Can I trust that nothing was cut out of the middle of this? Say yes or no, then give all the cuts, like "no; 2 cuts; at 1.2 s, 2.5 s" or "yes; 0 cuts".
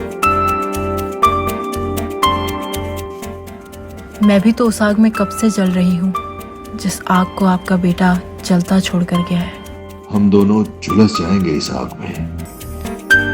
yes; 0 cuts